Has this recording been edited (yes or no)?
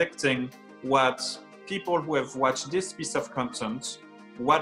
no